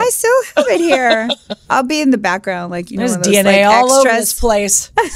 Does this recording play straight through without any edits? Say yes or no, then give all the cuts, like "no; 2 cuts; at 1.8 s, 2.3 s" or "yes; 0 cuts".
no; 1 cut; at 1.5 s